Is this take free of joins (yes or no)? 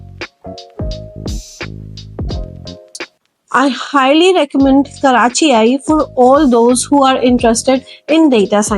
no